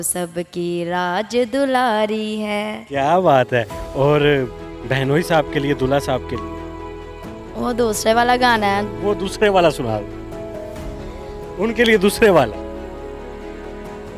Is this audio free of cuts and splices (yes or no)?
yes